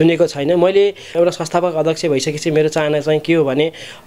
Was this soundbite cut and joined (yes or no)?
yes